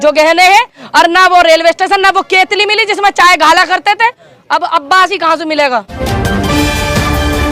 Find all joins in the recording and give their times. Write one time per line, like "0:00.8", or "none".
0:06.0